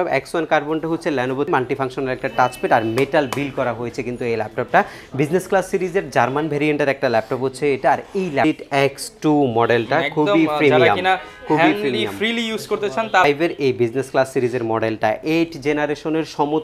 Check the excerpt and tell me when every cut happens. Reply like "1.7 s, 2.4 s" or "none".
1.5 s, 8.4 s, 13.2 s